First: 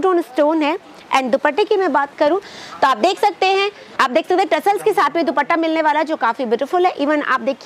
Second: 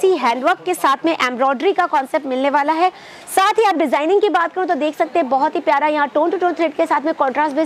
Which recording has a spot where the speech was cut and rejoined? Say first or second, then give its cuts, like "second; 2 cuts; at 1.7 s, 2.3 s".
first; 1 cut; at 3.8 s